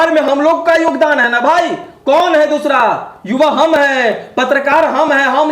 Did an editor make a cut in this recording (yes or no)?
no